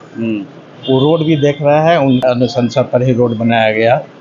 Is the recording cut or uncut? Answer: cut